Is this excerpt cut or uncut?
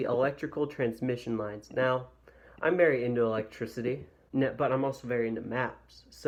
uncut